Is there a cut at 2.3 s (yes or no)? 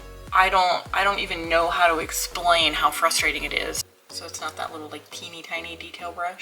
no